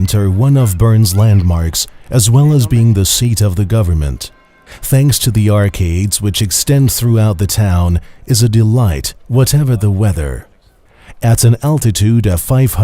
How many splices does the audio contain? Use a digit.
1